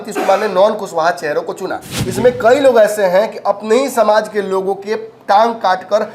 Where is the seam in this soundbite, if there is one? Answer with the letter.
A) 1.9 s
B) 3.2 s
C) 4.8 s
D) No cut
A